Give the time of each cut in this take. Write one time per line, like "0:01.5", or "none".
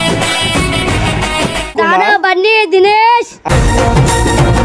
0:01.7